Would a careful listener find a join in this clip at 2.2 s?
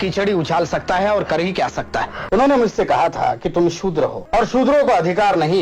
yes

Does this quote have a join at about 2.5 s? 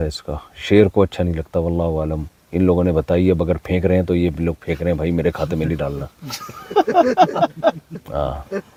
no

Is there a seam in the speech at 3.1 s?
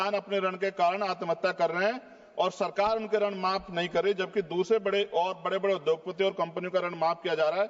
no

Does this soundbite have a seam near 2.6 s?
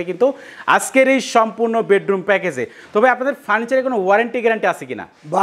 no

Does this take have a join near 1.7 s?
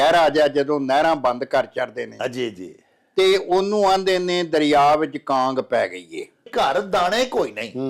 no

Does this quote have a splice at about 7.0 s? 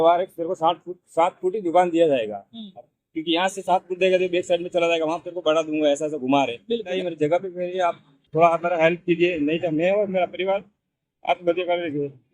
yes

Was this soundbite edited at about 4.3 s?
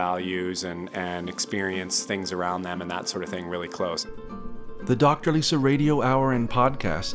yes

